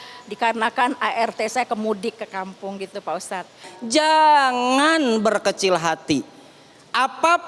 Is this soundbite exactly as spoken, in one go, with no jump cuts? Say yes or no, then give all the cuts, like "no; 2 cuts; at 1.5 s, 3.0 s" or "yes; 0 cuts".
no; 1 cut; at 3.7 s